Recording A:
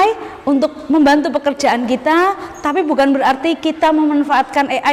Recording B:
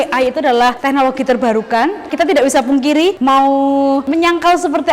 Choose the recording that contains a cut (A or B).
B